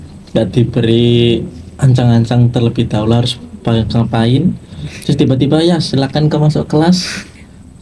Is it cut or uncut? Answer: uncut